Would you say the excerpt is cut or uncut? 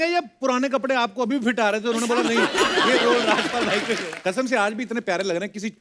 cut